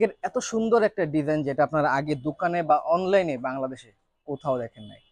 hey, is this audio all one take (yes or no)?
yes